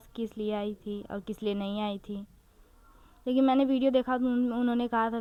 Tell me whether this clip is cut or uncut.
uncut